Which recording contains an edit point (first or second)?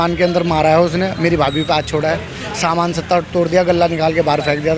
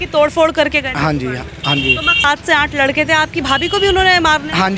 second